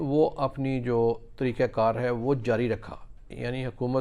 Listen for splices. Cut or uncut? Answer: uncut